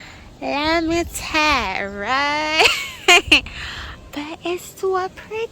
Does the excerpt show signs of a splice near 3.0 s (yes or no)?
no